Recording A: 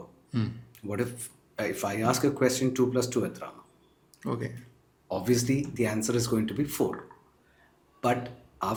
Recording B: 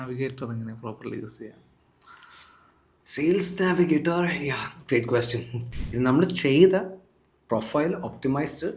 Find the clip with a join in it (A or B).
B